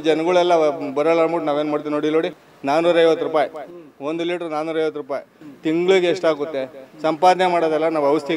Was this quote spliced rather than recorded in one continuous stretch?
no; 0 cuts

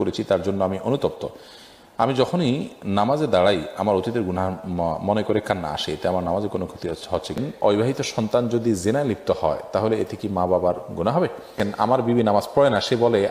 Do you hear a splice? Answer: yes; 2 cuts; at 7.7 s, 11.6 s

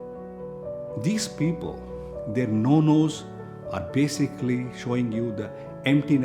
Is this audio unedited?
no; 1 cut; at 1.0 s

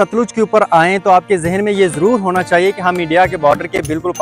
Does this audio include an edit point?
no; 0 cuts

